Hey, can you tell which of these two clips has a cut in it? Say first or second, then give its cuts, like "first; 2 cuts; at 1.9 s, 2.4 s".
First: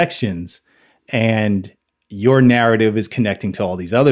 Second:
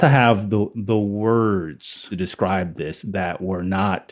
second; 1 cut; at 2.1 s